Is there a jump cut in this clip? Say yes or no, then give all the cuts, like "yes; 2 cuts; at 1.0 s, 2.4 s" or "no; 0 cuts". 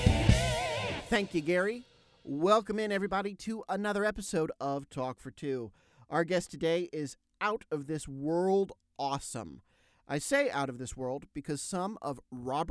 yes; 1 cut; at 1.0 s